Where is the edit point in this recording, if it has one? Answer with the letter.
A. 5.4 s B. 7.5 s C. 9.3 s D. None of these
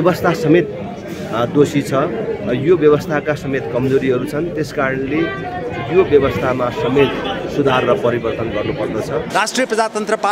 C